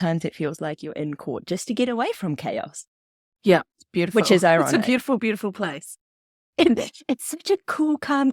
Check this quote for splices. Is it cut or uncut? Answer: uncut